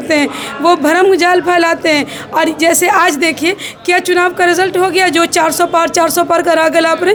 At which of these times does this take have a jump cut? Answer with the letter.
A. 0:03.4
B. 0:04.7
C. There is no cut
C